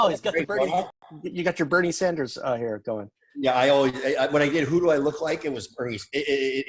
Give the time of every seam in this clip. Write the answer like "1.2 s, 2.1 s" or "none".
1.4 s